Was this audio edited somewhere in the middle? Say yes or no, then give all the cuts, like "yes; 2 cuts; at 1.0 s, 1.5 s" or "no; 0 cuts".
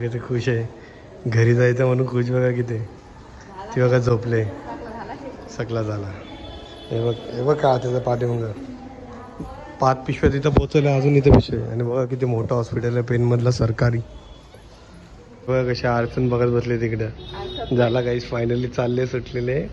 no; 0 cuts